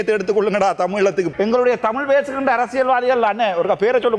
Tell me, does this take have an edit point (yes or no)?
yes